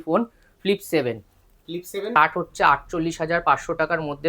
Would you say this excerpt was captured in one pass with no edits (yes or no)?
no